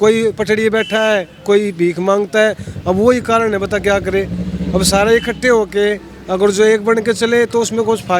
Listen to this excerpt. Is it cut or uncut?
uncut